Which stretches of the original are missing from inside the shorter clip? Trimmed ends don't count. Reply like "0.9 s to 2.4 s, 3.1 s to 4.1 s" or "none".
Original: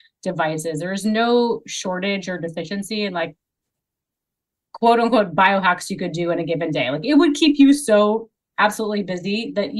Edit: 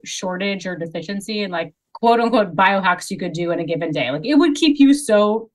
3.4 s to 4.6 s